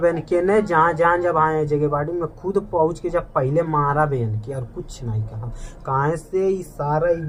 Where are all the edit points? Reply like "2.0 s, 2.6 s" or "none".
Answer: none